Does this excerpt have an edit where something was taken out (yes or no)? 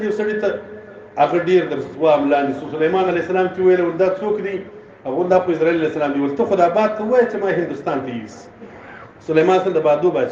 no